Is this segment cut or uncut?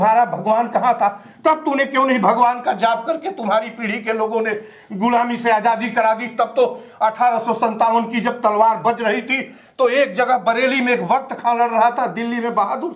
uncut